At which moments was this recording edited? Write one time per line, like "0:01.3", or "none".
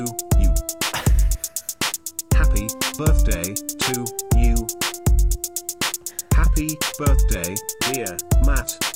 none